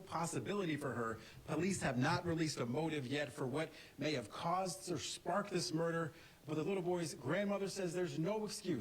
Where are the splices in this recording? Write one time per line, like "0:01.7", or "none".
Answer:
0:06.2